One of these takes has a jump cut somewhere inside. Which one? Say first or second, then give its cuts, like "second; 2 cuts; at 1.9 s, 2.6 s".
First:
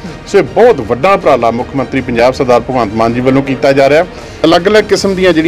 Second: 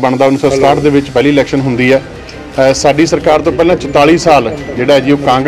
first; 1 cut; at 4.2 s